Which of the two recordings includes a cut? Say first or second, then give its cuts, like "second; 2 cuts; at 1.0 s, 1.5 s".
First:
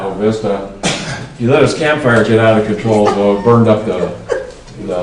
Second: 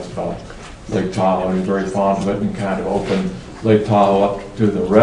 first; 1 cut; at 1.6 s